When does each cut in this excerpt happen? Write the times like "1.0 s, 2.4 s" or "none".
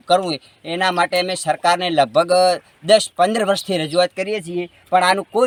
none